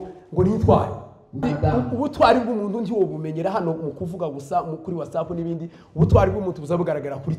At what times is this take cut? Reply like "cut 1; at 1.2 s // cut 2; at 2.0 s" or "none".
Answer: cut 1; at 1.4 s